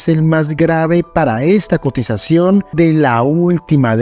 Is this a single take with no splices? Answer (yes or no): no